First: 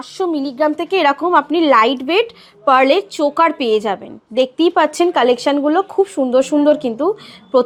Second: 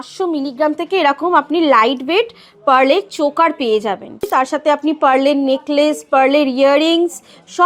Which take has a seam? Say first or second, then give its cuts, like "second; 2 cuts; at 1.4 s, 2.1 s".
second; 1 cut; at 4.3 s